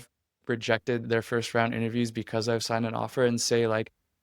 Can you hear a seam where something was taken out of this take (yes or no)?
yes